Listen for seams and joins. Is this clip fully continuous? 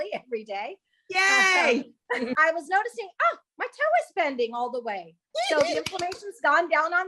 no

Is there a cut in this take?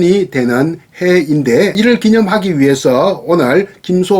yes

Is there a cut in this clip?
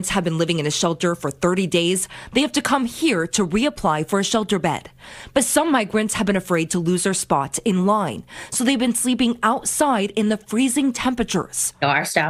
no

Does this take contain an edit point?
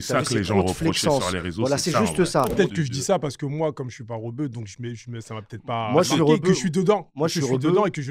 yes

